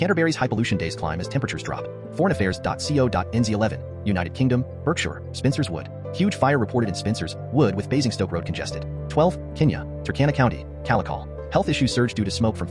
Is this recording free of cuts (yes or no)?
yes